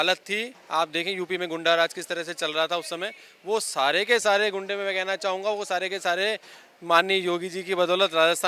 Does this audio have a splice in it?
no; 0 cuts

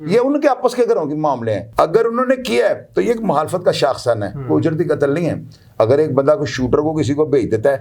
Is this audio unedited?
no; 1 cut; at 1.6 s

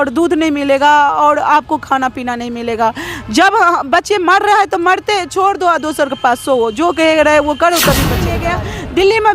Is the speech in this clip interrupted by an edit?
yes; 1 cut; at 8.4 s

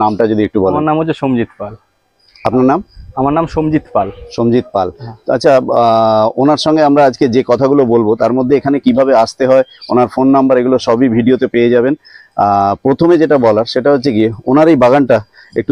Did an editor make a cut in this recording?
no; 0 cuts

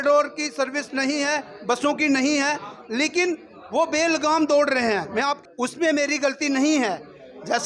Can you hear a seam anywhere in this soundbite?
yes; 1 cut; at 5.4 s

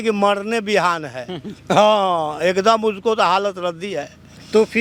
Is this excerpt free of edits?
yes; 0 cuts

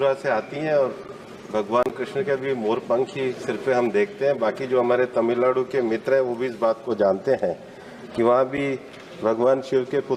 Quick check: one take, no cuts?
yes; 0 cuts

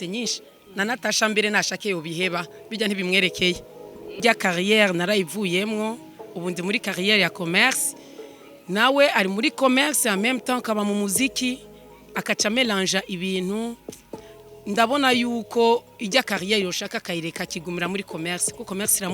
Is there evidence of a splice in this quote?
yes; 1 cut; at 4.2 s

